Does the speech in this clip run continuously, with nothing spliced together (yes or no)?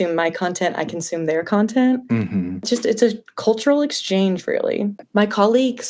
no